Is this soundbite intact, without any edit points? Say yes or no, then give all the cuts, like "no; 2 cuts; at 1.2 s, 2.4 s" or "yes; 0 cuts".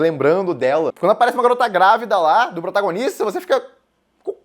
no; 1 cut; at 0.9 s